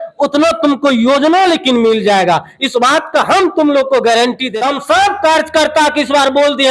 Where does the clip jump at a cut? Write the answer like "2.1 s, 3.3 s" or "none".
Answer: 4.5 s